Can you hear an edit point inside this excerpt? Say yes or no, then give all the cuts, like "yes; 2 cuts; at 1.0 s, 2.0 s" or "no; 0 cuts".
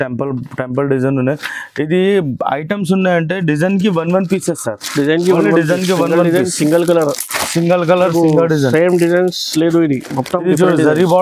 no; 0 cuts